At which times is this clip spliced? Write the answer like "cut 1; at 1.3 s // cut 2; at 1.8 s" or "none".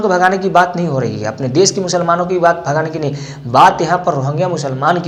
none